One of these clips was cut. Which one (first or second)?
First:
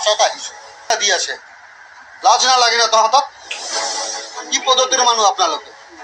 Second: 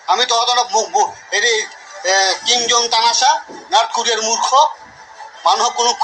first